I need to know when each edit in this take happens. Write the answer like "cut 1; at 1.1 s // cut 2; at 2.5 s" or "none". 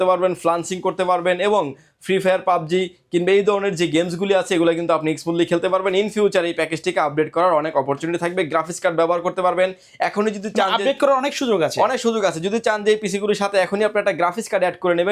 none